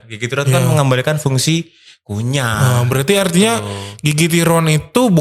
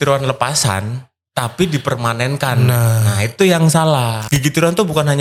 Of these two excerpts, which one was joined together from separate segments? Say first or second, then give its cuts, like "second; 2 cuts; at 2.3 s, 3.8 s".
second; 1 cut; at 4.2 s